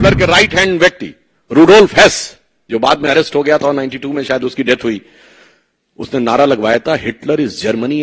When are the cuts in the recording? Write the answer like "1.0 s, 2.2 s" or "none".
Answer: none